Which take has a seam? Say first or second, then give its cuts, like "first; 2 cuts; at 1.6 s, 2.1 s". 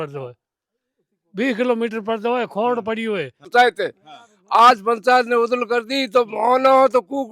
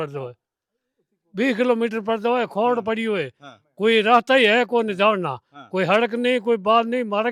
first; 1 cut; at 3.4 s